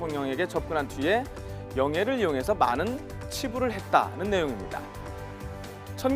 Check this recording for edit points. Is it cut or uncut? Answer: cut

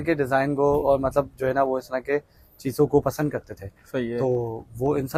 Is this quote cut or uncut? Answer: uncut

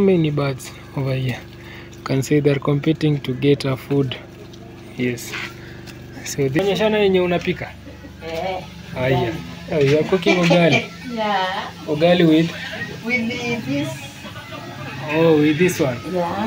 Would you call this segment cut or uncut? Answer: cut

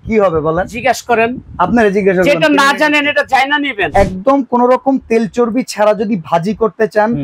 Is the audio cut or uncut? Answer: cut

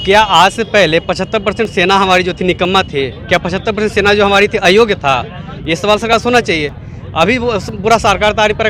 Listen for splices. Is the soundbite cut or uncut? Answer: uncut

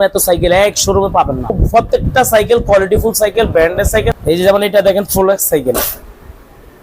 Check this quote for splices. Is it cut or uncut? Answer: cut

